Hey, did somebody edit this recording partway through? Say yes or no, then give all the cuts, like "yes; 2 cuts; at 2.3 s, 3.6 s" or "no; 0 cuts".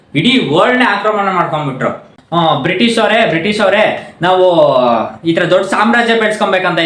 yes; 1 cut; at 2.2 s